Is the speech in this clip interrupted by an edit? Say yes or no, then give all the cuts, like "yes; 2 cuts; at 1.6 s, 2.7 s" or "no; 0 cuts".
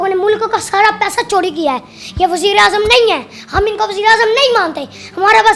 no; 0 cuts